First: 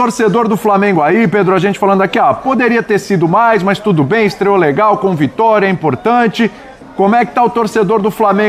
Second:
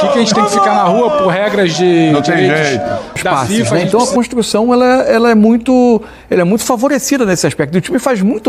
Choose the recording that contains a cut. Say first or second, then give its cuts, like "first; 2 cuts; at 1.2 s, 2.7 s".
second; 1 cut; at 3.7 s